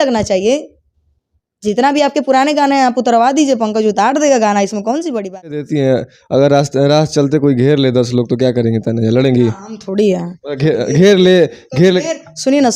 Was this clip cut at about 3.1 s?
no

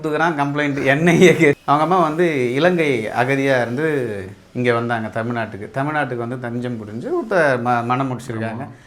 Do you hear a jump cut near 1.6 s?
yes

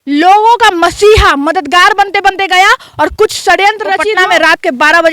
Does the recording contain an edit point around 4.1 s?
yes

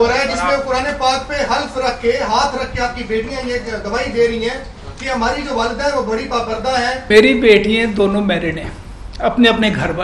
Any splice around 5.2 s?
no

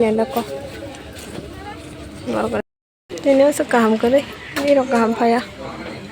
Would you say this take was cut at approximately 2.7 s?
yes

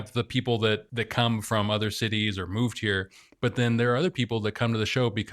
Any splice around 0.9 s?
yes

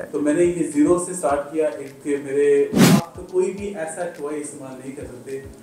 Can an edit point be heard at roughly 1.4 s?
no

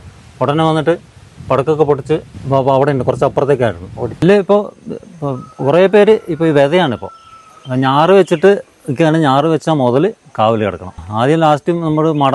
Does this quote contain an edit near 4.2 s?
yes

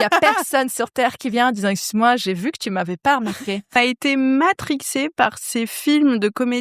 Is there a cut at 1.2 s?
no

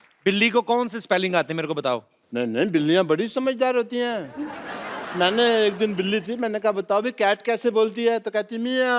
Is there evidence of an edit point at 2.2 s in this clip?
yes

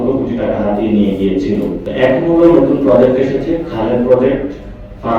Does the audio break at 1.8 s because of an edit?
yes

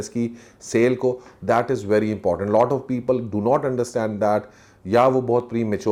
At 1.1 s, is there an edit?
no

